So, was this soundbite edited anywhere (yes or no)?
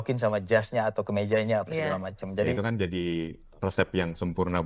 yes